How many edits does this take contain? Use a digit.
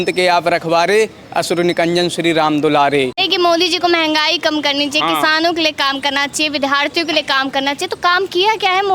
1